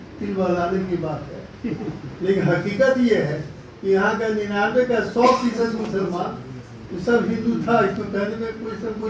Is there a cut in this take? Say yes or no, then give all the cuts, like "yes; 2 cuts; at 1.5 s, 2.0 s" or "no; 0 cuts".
no; 0 cuts